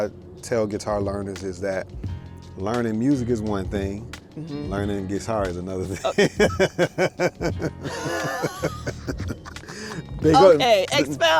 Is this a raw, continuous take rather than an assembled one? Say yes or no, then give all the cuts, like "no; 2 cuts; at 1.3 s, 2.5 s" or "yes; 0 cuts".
yes; 0 cuts